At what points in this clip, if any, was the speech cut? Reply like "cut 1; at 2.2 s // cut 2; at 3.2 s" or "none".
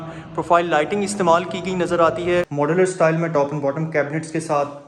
cut 1; at 2.5 s